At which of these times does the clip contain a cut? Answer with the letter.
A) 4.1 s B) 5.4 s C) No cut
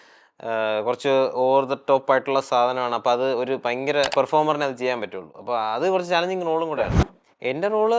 A